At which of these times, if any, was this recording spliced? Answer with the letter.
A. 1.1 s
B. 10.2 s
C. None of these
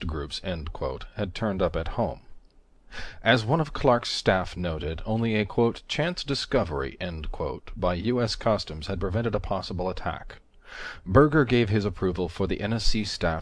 A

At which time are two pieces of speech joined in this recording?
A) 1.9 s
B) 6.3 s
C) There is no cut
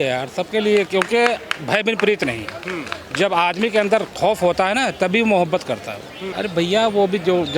B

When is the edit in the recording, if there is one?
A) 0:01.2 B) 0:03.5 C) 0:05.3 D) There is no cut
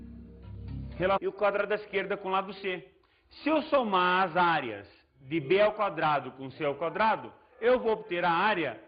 D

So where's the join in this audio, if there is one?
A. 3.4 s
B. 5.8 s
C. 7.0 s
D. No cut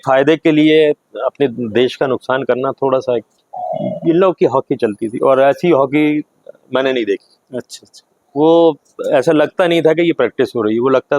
A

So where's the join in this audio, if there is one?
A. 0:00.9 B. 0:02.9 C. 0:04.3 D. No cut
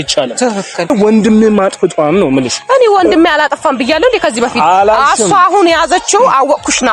A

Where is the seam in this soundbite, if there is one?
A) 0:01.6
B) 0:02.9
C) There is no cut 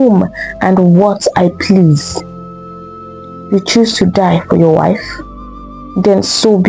C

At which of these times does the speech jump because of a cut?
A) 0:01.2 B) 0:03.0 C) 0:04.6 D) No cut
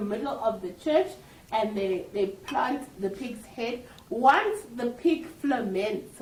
D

